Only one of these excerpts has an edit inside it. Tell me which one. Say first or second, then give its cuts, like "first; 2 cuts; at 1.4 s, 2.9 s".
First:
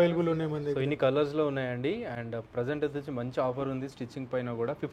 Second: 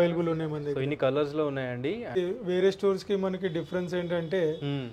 second; 1 cut; at 2.2 s